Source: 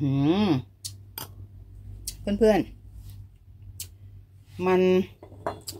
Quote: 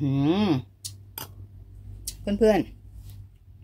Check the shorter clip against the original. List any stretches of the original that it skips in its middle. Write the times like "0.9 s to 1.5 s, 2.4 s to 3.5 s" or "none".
none